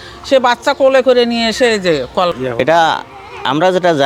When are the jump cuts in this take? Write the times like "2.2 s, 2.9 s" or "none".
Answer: 2.3 s